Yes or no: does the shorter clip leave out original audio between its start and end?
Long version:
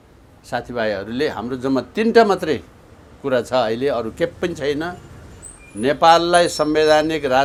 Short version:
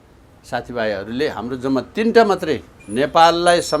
yes